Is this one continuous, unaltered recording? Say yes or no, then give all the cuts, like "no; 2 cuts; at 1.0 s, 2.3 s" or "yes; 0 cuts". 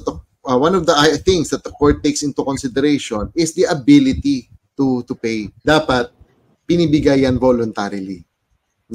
no; 1 cut; at 5.5 s